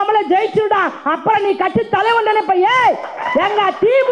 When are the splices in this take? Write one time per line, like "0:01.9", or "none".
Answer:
none